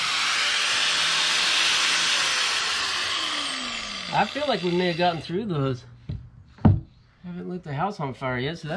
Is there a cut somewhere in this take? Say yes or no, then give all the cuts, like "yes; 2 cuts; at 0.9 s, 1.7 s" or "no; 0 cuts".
no; 0 cuts